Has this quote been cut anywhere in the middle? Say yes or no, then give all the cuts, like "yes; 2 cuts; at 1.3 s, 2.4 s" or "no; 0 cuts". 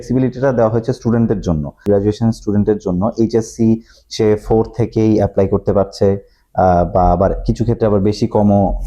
yes; 1 cut; at 1.8 s